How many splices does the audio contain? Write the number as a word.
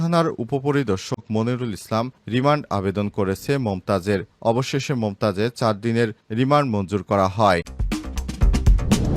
one